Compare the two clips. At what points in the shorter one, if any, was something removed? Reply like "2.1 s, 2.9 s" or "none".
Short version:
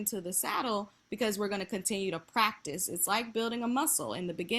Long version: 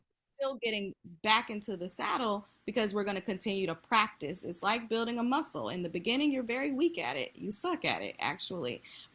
none